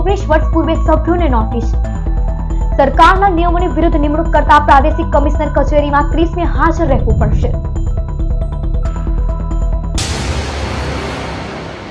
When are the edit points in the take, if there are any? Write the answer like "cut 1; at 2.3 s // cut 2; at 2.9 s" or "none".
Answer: cut 1; at 9.9 s